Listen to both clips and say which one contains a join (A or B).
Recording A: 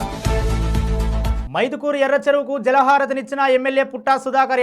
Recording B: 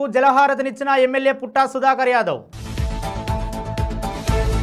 A